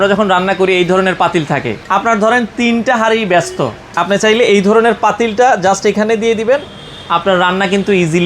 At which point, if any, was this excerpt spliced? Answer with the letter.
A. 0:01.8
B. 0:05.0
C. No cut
A